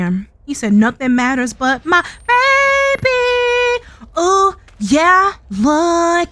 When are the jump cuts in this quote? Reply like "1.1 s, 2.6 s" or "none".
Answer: none